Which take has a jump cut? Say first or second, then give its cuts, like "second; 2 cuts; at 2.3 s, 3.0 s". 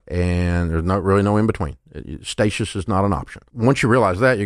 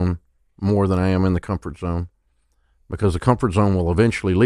first; 1 cut; at 3.4 s